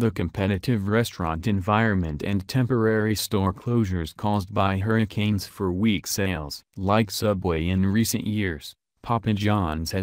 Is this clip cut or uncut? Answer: uncut